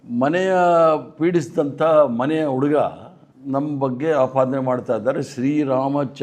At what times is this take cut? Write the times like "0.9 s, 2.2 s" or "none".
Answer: none